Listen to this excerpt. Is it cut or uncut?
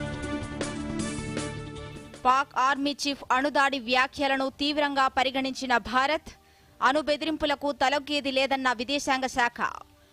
uncut